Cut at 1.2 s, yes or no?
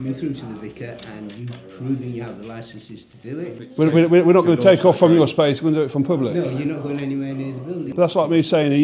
no